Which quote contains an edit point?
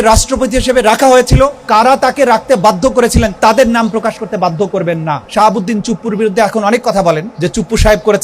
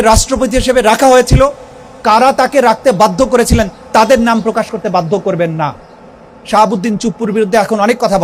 first; 4 cuts; at 1.6 s, 3.3 s, 4.7 s, 7.3 s

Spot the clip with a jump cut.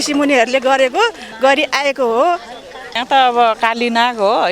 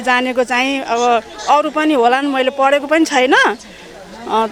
first; 1 cut; at 2.9 s

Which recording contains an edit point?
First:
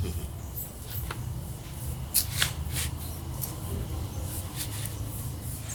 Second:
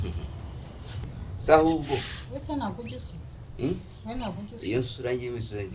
second; 1 cut; at 1.0 s

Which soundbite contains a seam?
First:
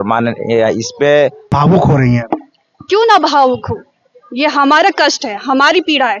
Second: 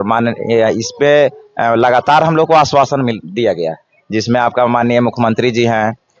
first; 1 cut; at 1.5 s

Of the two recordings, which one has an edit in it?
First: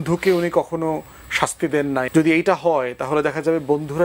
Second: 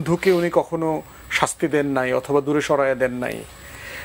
first; 1 cut; at 2.1 s

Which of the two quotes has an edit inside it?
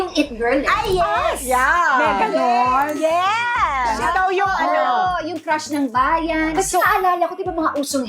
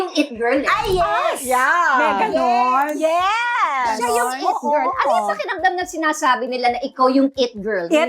first; 2 cuts; at 4.0 s, 6.5 s

